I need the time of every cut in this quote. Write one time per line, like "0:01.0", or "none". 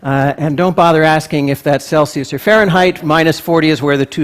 0:03.0

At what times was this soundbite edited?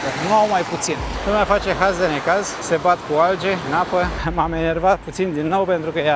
0:01.1
0:02.6
0:03.9

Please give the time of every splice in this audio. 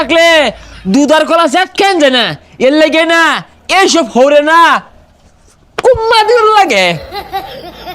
0:07.0

